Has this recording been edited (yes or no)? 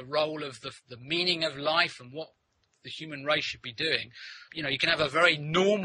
yes